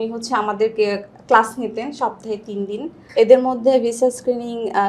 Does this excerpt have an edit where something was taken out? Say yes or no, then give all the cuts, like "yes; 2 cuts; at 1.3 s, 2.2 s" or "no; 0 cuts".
yes; 1 cut; at 3.0 s